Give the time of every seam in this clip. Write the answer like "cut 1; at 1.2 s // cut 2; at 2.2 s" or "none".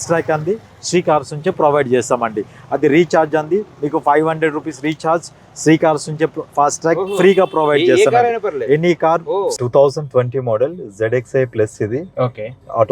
cut 1; at 9.6 s